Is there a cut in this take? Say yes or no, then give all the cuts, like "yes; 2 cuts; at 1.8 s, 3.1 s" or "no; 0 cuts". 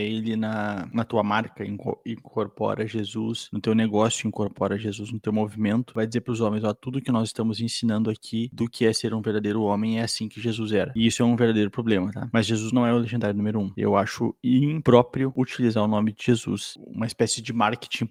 no; 0 cuts